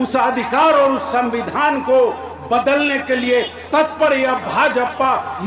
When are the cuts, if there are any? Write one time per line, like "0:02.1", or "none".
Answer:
none